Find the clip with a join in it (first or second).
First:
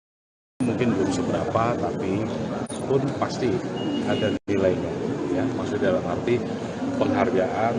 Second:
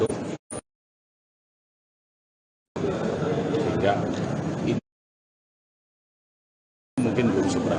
first